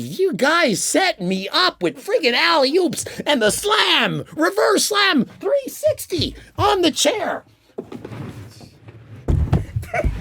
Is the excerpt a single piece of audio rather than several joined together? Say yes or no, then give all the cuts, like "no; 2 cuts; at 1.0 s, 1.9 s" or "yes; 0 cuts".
yes; 0 cuts